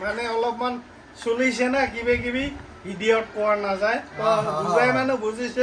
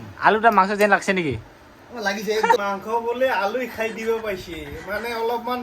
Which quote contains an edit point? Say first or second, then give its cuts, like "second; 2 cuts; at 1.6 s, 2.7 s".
second; 1 cut; at 2.6 s